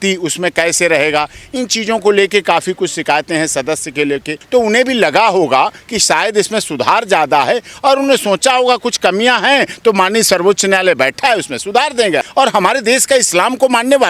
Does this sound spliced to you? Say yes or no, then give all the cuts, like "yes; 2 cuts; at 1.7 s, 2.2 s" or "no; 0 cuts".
yes; 2 cuts; at 4.3 s, 12.3 s